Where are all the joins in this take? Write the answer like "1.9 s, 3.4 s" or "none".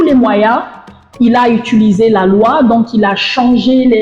none